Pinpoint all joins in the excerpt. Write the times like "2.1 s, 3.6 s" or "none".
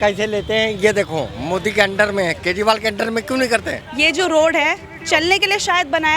3.8 s